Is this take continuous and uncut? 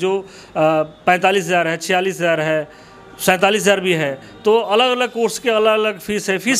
yes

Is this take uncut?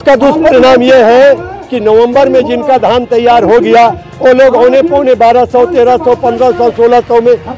yes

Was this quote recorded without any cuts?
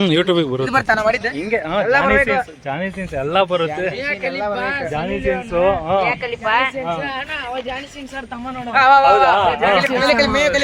yes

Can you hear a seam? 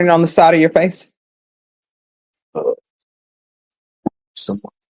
no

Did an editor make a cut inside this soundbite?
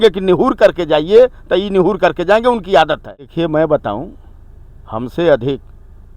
yes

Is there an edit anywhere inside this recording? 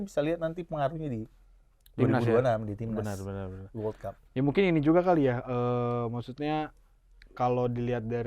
no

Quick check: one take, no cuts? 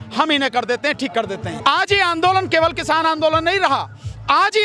no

